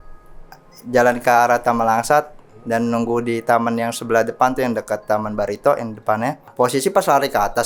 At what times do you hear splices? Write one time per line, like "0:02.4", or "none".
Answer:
0:06.5